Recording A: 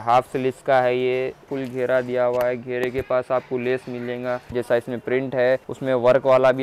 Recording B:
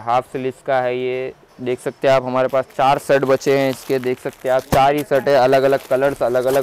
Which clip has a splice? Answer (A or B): A